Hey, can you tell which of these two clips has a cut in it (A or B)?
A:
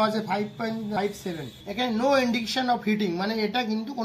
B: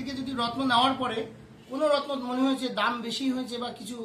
A